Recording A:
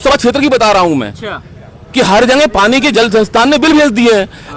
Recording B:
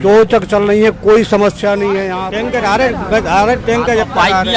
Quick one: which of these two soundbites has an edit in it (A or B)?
B